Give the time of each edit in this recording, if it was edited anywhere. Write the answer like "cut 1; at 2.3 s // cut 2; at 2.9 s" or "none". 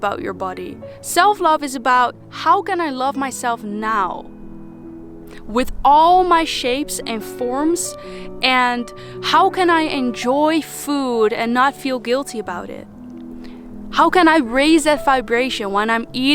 none